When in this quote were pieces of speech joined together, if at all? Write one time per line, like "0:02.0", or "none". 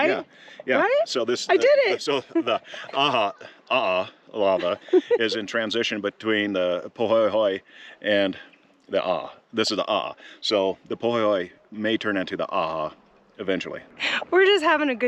0:14.1